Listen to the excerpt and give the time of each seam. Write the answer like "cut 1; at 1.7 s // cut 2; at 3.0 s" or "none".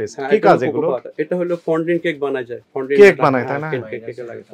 none

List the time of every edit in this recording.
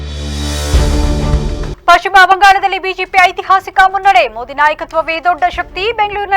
cut 1; at 1.7 s

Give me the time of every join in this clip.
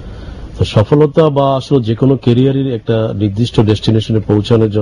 cut 1; at 1.4 s

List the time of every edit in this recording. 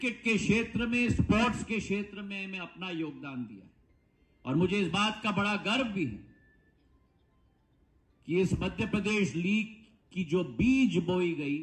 none

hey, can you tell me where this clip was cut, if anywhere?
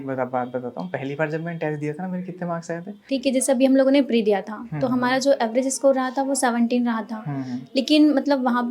cut 1; at 3.0 s

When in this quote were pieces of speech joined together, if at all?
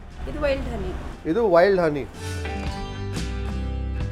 none

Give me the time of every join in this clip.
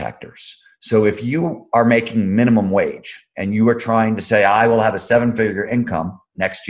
none

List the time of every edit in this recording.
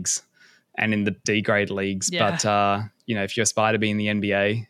cut 1; at 1.2 s

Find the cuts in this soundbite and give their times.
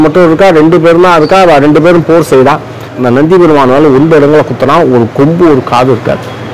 cut 1; at 2.9 s

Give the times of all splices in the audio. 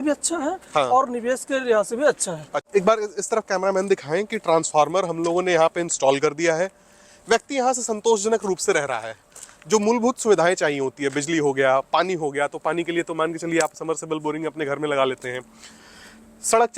cut 1; at 2.6 s

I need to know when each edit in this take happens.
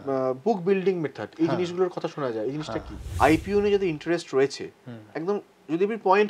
cut 1; at 3.0 s

